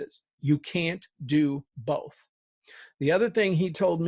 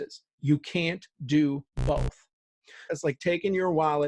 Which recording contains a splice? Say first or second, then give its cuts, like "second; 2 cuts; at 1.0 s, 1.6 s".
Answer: second; 1 cut; at 2.9 s